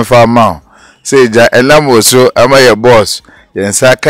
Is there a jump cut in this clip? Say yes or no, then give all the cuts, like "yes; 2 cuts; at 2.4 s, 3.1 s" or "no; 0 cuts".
no; 0 cuts